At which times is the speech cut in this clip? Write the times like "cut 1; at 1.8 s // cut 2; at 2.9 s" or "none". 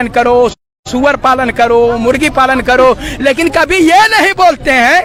none